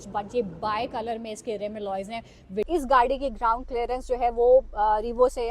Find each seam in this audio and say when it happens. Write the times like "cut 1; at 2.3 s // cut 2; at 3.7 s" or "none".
cut 1; at 2.7 s